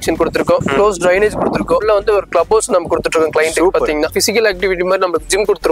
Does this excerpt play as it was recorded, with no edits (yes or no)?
no